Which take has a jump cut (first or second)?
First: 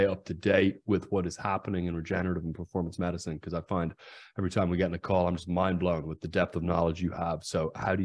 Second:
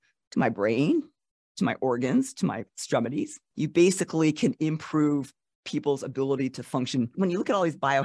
second